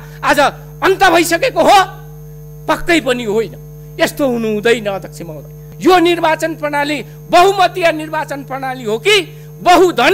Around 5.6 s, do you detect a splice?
yes; 1 cut; at 5.6 s

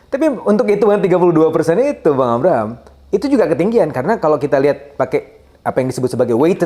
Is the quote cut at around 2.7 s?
no; 0 cuts

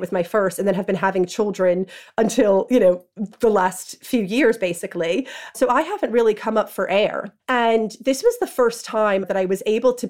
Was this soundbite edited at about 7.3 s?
yes; 3 cuts; at 5.5 s, 7.3 s, 9.3 s

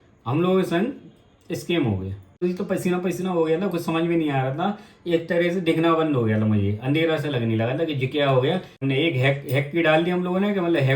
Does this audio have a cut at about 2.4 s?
yes; 2 cuts; at 2.4 s, 8.8 s

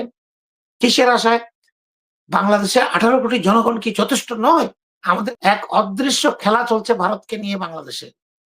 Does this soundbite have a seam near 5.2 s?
yes; 1 cut; at 5.2 s

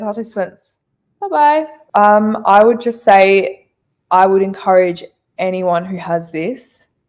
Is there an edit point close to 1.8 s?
yes; 1 cut; at 1.8 s

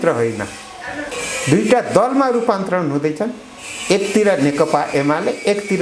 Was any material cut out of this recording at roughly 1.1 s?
yes; 1 cut; at 1.1 s

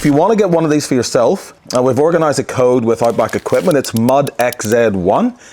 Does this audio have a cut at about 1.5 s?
yes; 1 cut; at 1.5 s

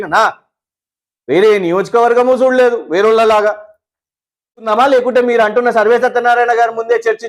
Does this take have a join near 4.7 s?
yes; 1 cut; at 4.7 s

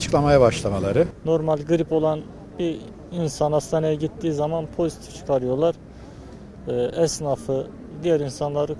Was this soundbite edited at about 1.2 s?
yes; 1 cut; at 1.2 s

